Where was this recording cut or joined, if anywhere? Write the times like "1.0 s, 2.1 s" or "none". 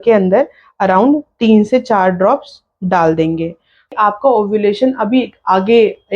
3.9 s